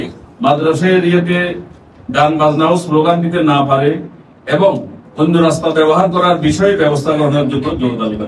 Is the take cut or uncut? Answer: uncut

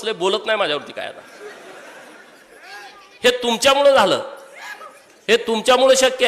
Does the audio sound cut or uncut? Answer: uncut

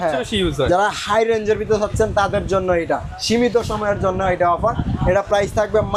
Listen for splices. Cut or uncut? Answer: uncut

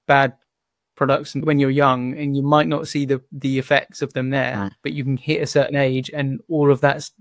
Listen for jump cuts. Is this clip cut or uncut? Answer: cut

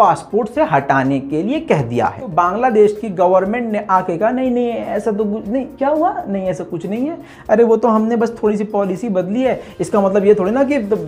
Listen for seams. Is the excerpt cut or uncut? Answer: cut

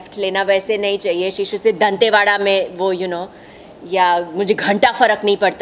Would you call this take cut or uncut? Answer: uncut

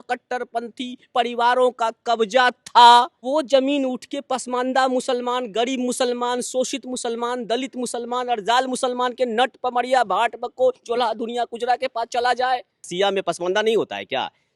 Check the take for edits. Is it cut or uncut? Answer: cut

